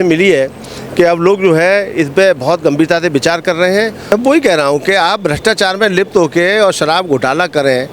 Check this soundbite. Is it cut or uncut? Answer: cut